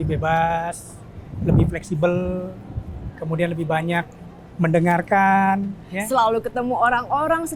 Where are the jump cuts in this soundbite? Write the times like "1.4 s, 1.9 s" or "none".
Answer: none